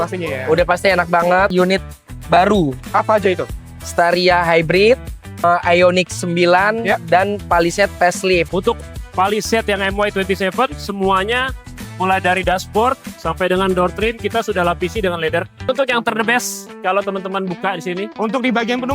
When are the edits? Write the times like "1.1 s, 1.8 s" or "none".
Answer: 1.5 s, 5.4 s, 8.5 s, 15.7 s